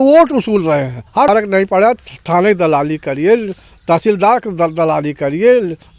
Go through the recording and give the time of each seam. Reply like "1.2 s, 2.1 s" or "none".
1.3 s